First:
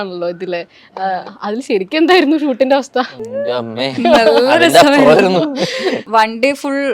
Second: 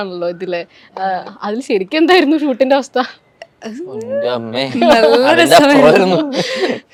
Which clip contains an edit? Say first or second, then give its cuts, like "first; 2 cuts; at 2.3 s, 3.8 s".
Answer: first; 2 cuts; at 3.2 s, 6.0 s